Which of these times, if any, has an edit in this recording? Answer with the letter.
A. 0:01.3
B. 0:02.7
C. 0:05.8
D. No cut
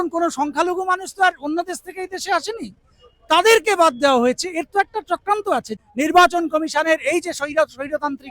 C